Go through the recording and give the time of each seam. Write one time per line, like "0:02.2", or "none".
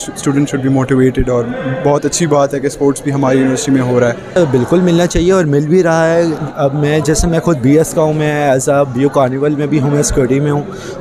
0:04.4